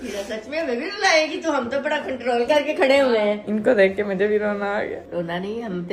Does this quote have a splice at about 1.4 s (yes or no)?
no